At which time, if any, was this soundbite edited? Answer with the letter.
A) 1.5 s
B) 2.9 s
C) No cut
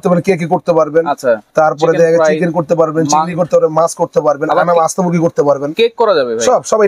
C